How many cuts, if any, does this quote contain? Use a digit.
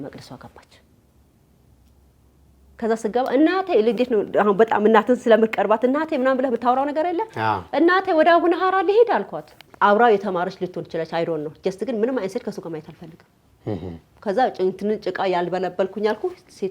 1